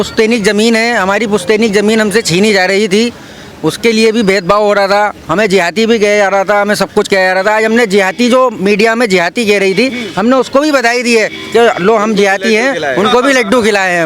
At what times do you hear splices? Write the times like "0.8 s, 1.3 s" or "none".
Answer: none